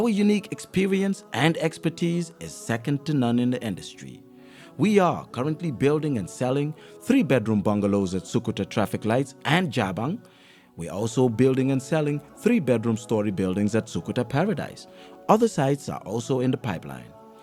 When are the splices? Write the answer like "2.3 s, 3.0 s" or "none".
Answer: none